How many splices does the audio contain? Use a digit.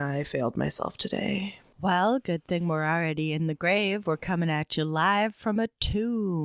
1